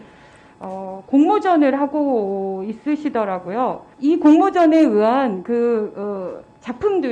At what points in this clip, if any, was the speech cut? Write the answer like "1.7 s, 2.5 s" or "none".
3.9 s